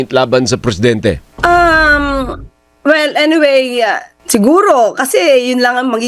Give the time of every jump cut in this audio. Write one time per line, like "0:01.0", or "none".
0:01.3
0:04.1